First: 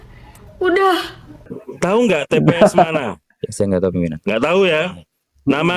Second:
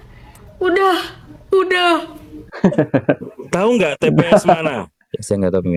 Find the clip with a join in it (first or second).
first